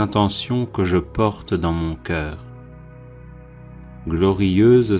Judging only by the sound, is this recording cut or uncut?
uncut